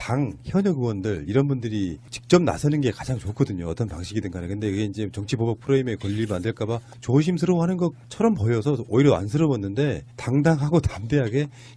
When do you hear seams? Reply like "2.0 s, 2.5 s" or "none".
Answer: none